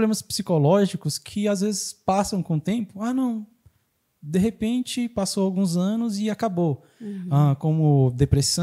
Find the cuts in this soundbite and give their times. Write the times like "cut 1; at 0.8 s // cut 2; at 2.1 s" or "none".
none